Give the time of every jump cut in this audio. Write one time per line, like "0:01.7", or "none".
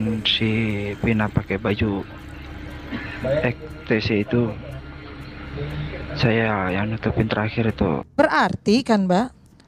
0:08.1